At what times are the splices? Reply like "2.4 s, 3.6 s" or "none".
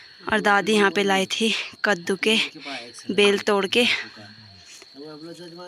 none